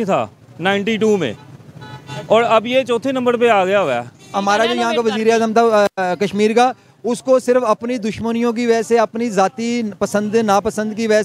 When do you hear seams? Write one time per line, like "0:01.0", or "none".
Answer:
0:04.3